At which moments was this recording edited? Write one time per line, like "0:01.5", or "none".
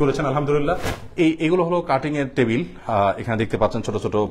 0:01.0